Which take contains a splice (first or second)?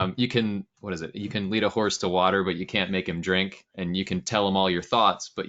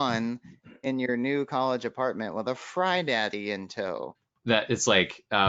second